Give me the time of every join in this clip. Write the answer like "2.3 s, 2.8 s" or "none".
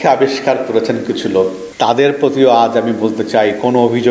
1.6 s